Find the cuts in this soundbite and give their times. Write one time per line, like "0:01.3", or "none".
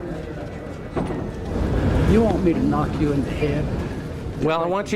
0:01.5